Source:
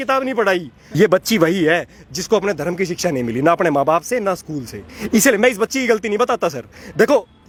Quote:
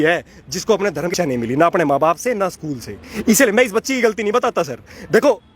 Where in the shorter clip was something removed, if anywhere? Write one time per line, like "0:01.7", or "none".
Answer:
0:01.1